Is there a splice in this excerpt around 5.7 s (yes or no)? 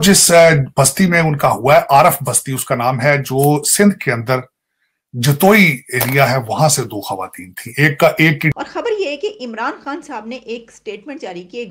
no